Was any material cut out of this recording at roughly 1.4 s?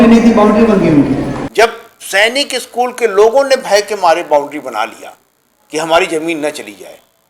yes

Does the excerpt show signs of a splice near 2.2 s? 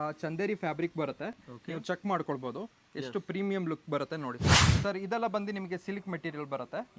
no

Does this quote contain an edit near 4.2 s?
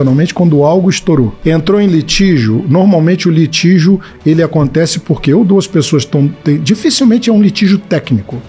no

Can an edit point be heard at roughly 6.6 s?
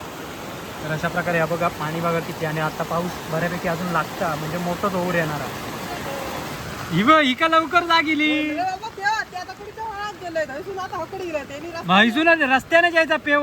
yes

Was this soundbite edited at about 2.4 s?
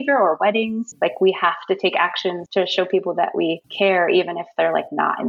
yes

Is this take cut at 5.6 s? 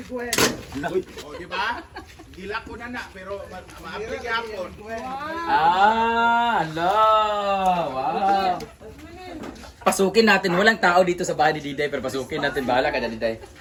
no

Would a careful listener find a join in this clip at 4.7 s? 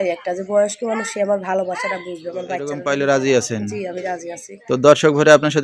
no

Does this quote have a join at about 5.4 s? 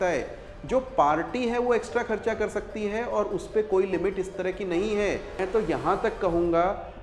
yes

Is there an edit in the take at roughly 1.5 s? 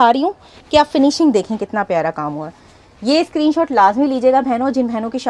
no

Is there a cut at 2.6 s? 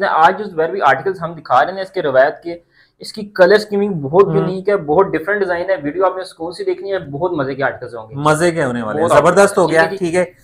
no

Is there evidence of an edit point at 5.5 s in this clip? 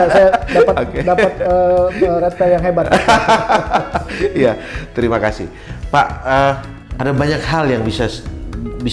no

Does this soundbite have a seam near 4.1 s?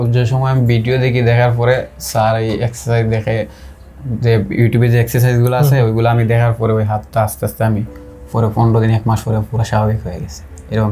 no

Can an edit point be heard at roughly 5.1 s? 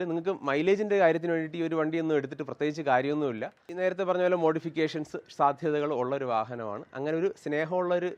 no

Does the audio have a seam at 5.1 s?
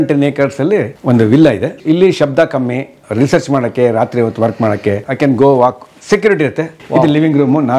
yes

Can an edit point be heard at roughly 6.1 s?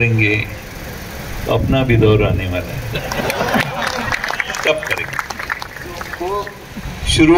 yes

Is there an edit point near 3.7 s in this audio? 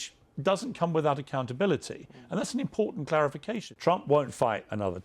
yes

